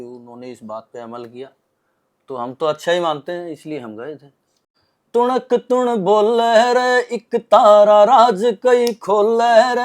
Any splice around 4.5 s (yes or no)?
yes